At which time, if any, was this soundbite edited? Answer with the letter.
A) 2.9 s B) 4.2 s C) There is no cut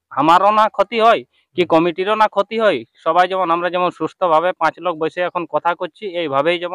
C